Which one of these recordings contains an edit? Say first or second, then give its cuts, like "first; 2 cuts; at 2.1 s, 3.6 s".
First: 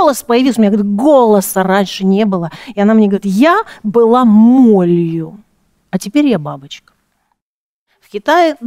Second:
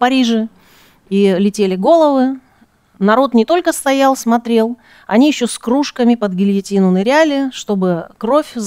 first; 1 cut; at 7.4 s